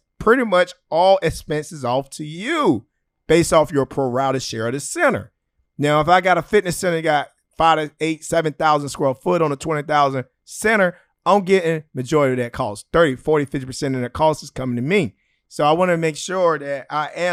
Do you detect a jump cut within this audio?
no; 0 cuts

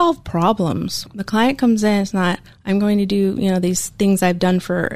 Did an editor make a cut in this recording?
no; 0 cuts

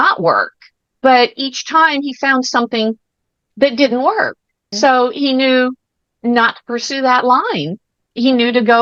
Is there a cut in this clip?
no; 0 cuts

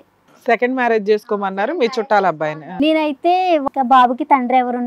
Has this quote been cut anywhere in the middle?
yes; 2 cuts; at 2.6 s, 3.6 s

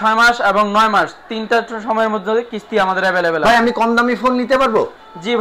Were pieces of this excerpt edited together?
no; 0 cuts

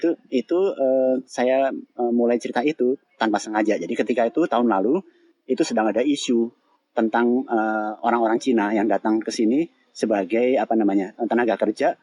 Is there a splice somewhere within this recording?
no; 0 cuts

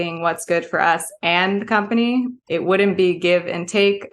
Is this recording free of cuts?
no; 1 cut; at 2.4 s

